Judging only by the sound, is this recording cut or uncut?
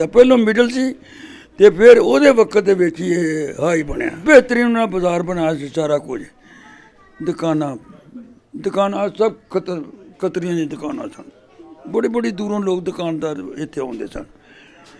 cut